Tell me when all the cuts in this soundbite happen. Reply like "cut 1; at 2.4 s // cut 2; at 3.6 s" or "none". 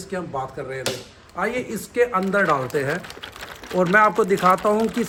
none